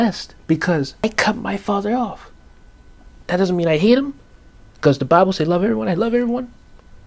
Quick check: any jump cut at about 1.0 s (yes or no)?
yes